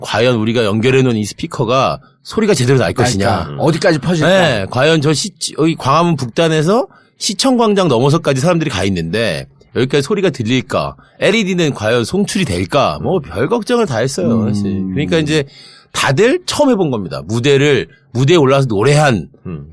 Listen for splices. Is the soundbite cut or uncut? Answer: cut